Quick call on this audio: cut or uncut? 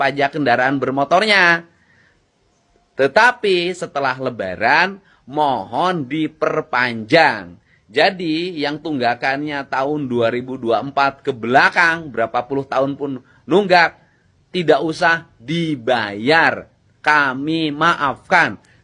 uncut